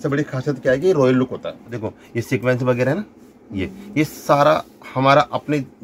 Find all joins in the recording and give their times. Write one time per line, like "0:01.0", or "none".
0:01.7